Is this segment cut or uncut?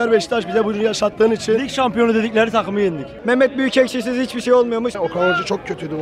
cut